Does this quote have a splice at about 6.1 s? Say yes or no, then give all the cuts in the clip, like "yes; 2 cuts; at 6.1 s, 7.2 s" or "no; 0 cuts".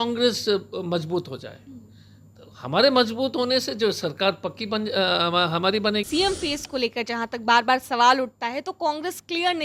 yes; 1 cut; at 6.1 s